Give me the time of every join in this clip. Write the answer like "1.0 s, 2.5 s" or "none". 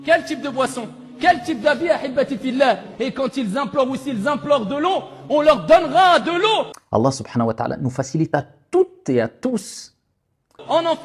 none